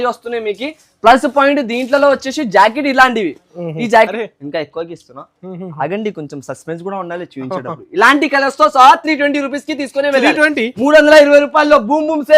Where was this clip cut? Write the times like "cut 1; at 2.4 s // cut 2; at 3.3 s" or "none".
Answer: cut 1; at 4.1 s